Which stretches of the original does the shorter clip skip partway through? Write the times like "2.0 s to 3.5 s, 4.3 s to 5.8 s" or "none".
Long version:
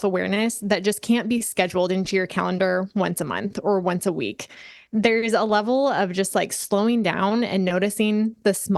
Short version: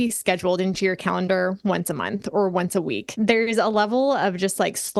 4.4 s to 4.8 s

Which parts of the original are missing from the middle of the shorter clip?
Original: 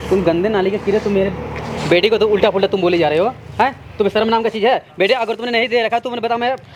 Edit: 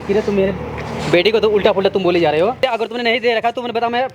3.4 s to 5.1 s

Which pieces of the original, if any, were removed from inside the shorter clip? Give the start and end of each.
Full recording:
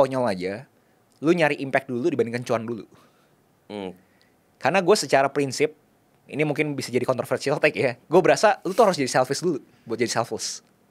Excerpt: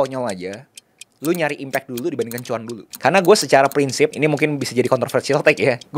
2.8 s to 4.4 s, 5.7 s to 6.3 s

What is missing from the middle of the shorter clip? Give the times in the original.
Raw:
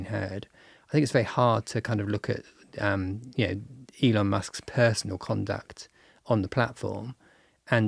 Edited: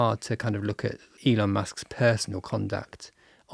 2.5 s to 3.8 s

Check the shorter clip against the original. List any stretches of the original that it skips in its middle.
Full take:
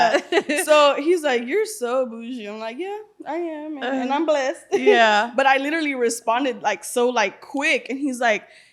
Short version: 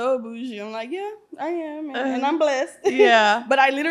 none

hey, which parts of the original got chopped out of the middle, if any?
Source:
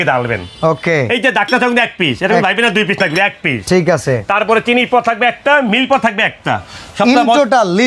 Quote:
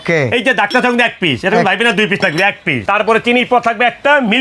3.6 s to 4.2 s

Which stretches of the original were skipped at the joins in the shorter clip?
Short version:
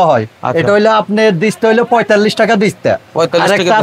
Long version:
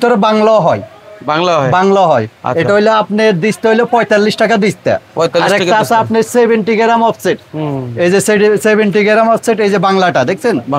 none

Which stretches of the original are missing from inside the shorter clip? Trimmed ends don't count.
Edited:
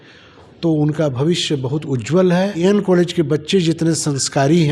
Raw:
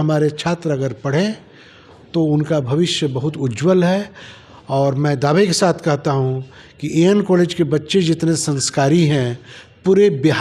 4.1 s to 7.0 s

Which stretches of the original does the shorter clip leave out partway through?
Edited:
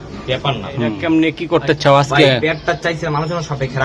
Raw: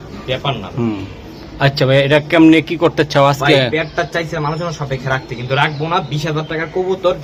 1.0 s to 2.3 s

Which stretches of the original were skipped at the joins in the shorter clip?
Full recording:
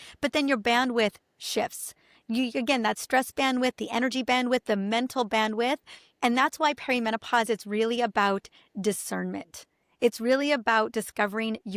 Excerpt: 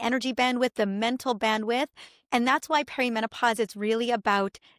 none

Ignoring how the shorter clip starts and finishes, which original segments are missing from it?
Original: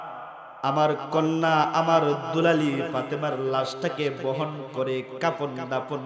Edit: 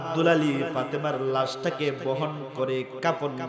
none

